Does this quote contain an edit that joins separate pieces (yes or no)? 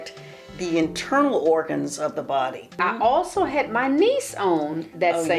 yes